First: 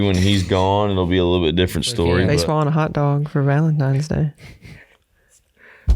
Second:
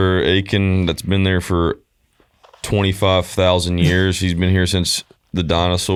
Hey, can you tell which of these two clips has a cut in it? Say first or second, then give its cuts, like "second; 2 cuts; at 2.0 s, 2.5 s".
first; 1 cut; at 2.3 s